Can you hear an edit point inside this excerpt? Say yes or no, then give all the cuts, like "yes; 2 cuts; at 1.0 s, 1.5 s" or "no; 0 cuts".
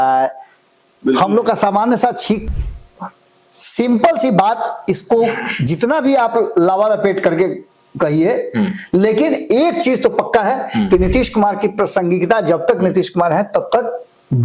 yes; 1 cut; at 2.5 s